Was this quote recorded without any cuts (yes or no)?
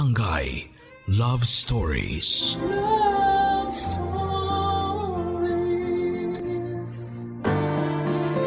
no